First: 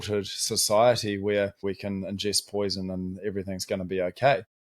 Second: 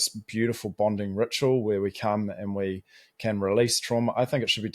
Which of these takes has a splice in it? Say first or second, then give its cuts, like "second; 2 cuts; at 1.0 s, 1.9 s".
first; 1 cut; at 1.6 s